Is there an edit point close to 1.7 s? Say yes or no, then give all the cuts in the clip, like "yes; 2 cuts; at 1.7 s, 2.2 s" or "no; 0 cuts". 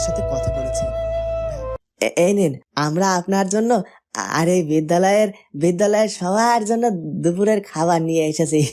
yes; 1 cut; at 1.7 s